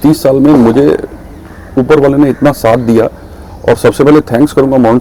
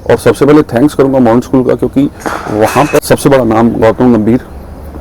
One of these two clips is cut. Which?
second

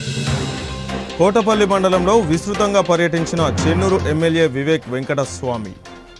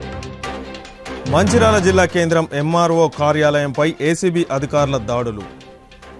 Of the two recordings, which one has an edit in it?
first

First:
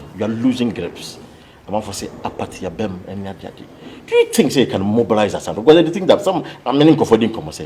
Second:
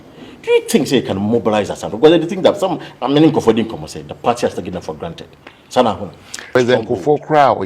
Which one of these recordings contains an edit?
second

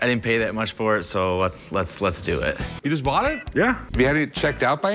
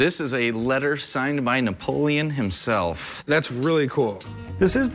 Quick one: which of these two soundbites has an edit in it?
first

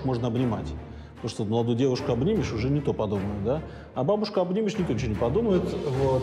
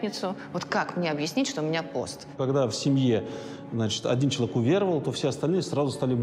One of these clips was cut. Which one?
second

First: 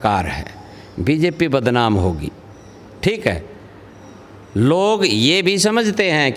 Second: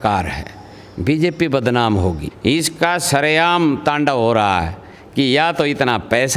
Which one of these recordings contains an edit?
second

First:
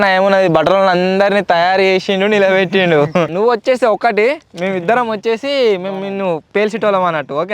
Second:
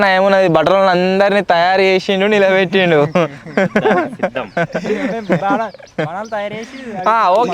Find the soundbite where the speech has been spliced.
first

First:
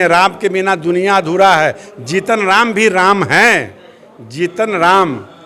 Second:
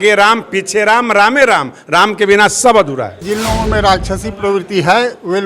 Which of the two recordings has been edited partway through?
second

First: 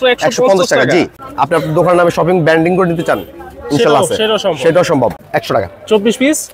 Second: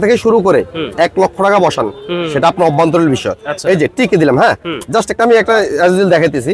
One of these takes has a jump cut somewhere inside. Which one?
first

